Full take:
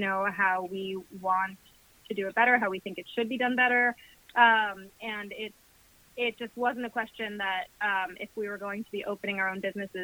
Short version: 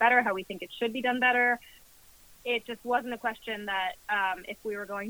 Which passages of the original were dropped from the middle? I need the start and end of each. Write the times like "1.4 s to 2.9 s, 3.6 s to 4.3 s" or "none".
4.1 s to 5.5 s